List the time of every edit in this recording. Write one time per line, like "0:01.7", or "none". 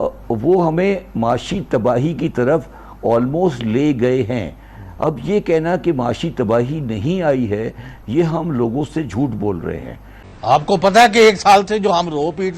0:10.5

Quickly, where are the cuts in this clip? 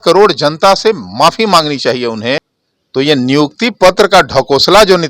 0:02.4

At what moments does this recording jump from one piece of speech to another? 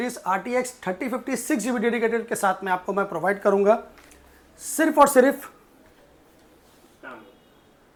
none

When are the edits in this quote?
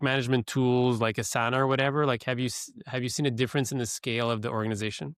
none

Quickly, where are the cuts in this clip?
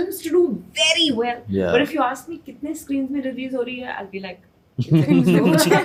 none

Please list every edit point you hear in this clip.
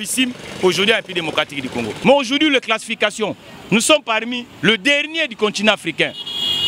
0:01.9

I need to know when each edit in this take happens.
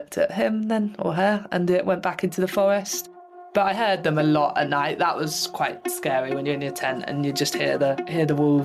none

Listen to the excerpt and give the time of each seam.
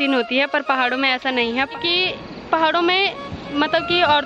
0:01.7

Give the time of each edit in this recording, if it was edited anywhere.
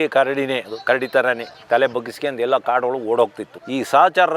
0:01.5

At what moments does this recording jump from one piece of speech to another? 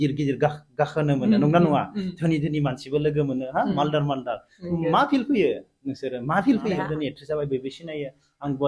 0:06.8

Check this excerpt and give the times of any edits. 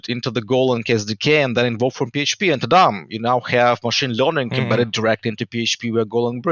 none

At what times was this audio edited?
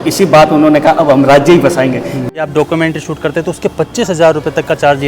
0:02.4

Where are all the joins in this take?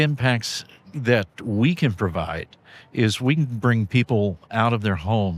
none

